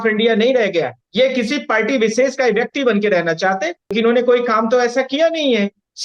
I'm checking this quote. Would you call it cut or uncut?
cut